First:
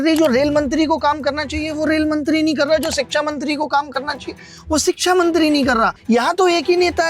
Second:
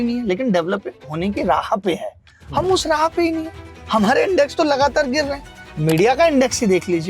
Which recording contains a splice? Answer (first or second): first